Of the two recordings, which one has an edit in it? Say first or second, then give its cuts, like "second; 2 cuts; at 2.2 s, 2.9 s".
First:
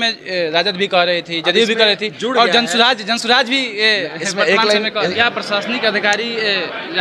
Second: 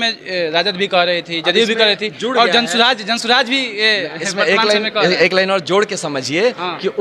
first; 1 cut; at 5.1 s